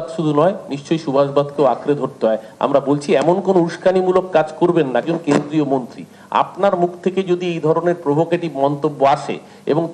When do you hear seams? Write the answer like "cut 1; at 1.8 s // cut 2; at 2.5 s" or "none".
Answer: none

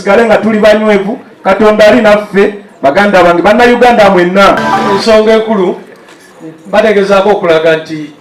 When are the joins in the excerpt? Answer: cut 1; at 4.9 s

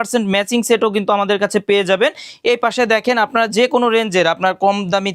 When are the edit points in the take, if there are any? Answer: none

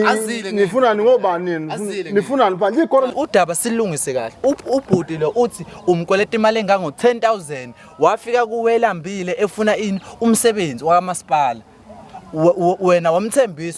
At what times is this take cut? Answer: cut 1; at 3.1 s

